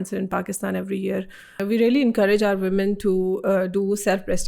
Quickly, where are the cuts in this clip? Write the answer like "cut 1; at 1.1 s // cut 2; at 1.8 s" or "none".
cut 1; at 1.6 s